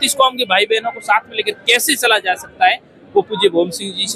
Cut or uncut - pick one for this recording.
uncut